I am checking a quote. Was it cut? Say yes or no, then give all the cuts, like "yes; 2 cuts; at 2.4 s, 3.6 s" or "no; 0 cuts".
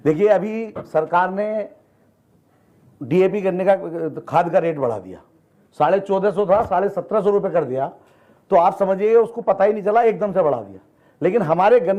no; 0 cuts